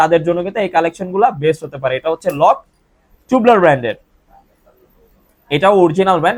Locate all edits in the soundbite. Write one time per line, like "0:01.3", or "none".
none